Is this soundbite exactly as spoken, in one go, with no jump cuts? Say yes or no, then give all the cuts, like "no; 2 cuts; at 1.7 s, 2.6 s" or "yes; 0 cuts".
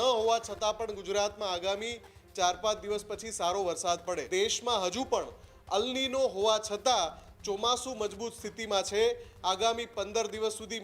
no; 1 cut; at 4.2 s